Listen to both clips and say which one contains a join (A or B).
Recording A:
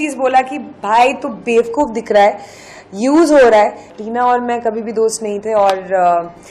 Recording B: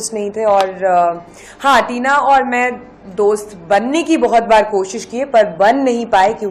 A